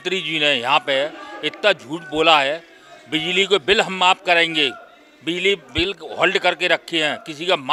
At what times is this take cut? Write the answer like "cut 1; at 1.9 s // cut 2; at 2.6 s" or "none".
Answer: none